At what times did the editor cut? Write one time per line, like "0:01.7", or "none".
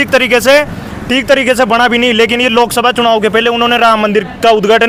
none

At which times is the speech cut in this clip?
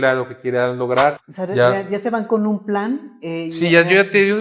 0:01.3

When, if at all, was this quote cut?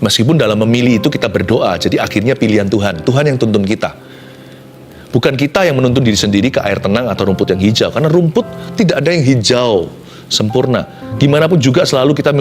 0:07.5

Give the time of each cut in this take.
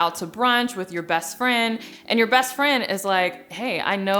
0:01.9

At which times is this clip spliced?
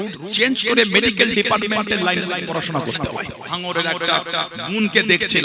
0:03.4

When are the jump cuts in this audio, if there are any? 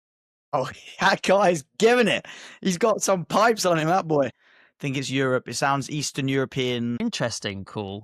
0:07.0

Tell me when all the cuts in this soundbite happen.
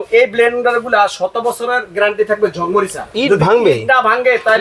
0:03.0

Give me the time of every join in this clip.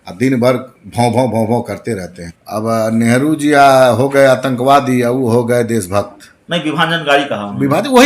0:02.4

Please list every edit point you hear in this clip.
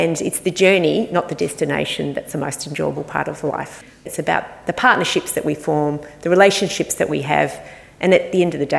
0:04.0

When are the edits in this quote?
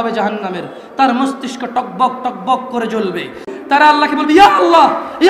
0:03.5

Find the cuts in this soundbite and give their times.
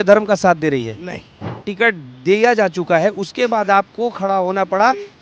0:01.6

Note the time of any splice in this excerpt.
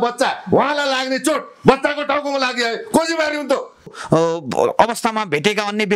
0:04.0

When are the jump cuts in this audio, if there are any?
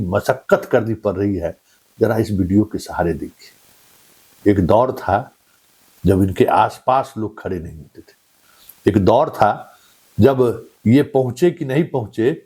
none

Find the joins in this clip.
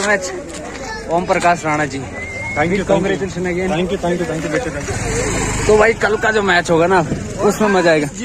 none

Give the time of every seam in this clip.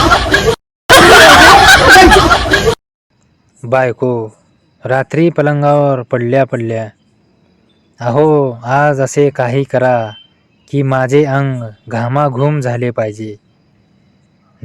0:00.9
0:02.9

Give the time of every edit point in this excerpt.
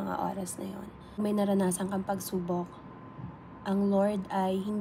0:01.2

